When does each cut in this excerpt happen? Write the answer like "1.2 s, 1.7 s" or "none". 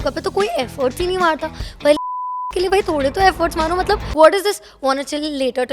4.1 s